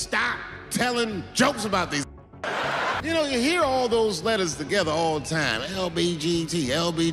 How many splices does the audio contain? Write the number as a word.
one